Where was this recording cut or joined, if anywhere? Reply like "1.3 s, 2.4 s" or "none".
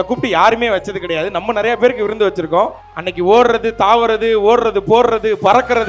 2.8 s